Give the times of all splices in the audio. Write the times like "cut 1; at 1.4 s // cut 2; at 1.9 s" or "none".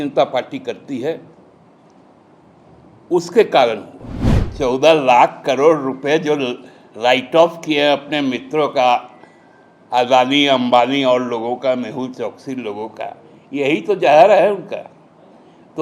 cut 1; at 4.4 s